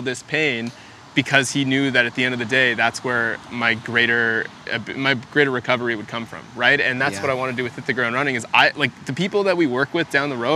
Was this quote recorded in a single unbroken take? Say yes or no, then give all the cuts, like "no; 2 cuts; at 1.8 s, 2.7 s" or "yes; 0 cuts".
yes; 0 cuts